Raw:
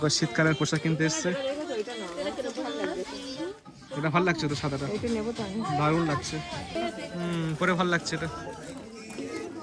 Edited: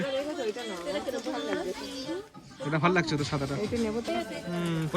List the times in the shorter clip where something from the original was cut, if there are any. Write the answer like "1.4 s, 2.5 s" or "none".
4.0 s